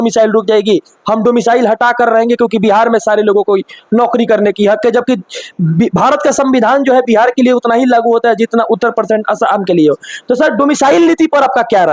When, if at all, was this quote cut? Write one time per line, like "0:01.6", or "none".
none